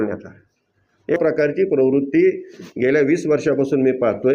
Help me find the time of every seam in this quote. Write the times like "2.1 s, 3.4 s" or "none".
1.2 s